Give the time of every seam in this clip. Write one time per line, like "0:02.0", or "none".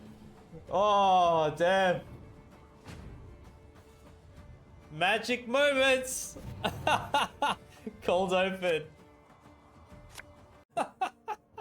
0:10.7